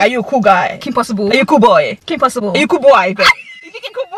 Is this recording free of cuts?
yes; 0 cuts

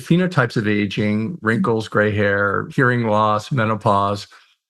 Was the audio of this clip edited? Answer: yes; 1 cut; at 2.7 s

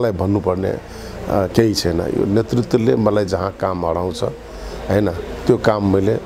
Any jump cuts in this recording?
no; 0 cuts

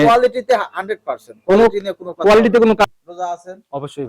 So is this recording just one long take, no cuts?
no; 1 cut; at 2.8 s

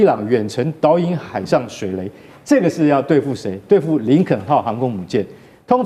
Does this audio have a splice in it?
no; 0 cuts

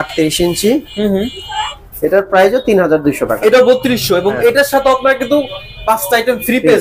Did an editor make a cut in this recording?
no; 0 cuts

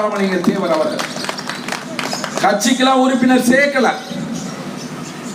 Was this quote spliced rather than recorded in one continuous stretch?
no; 0 cuts

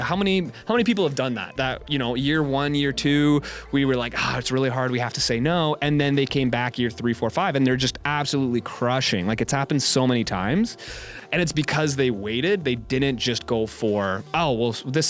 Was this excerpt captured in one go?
yes; 0 cuts

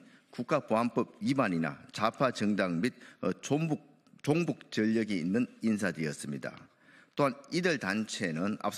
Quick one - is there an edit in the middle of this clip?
no; 0 cuts

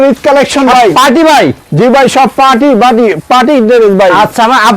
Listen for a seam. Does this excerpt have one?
no; 0 cuts

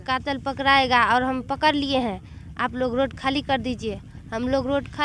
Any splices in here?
no; 0 cuts

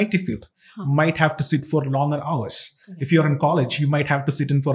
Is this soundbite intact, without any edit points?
yes; 0 cuts

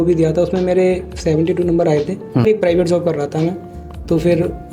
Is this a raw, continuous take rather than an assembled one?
no; 1 cut; at 2.4 s

